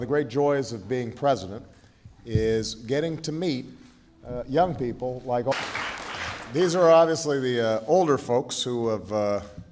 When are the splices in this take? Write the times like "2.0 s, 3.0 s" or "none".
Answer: none